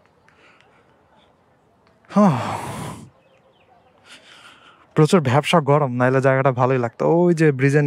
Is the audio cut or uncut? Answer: uncut